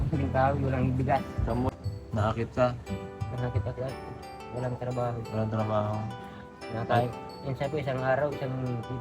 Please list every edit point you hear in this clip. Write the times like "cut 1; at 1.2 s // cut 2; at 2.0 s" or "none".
cut 1; at 1.8 s